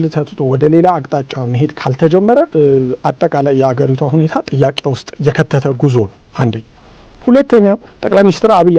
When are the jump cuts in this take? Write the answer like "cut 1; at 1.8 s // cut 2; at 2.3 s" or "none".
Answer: cut 1; at 2.5 s // cut 2; at 5.1 s // cut 3; at 7.9 s